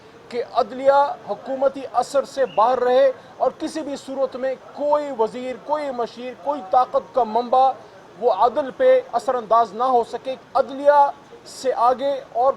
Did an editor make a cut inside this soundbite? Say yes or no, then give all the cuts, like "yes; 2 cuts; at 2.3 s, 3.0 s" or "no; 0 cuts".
yes; 1 cut; at 10.3 s